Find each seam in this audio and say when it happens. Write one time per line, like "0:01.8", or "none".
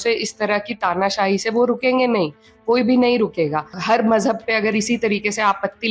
0:03.8